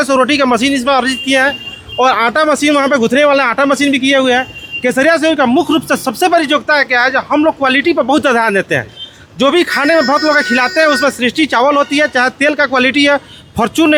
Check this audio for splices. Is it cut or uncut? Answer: uncut